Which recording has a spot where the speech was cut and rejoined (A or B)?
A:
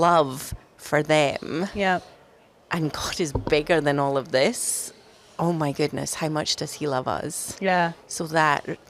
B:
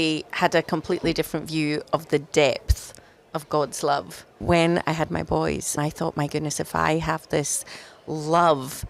B